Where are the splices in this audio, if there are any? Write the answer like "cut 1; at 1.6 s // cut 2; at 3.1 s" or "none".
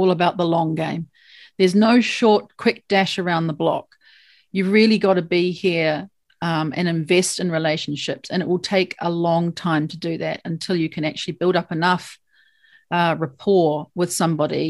none